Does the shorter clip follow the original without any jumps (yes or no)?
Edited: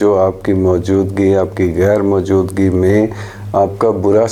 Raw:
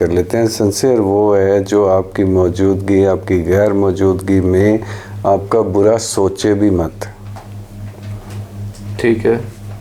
yes